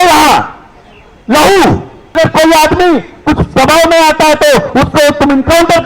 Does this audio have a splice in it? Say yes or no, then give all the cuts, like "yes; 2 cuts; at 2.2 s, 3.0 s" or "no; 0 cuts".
yes; 1 cut; at 2.2 s